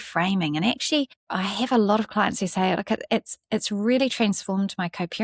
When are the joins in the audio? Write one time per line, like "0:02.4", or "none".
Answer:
0:01.2

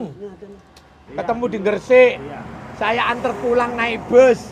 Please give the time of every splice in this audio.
0:01.0

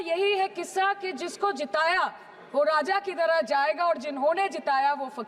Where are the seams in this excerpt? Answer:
none

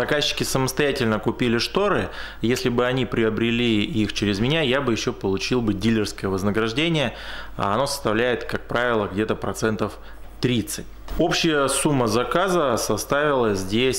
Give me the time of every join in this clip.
none

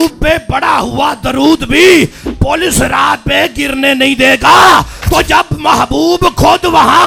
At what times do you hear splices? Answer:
none

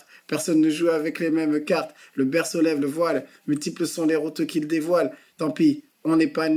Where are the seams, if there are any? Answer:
none

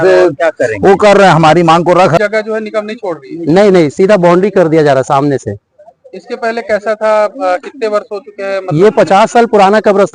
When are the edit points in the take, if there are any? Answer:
0:02.2

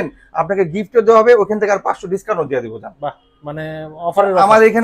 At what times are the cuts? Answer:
none

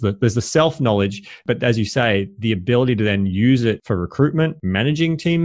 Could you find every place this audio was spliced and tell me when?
0:03.8
0:04.6

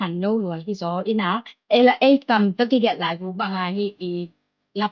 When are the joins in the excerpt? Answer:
0:01.5

